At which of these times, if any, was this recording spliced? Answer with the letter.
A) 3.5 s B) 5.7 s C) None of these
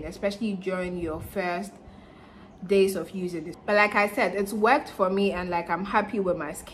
A